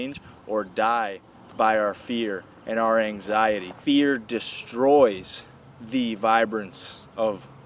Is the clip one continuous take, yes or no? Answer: no